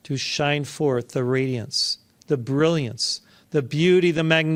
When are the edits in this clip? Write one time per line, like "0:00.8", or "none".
none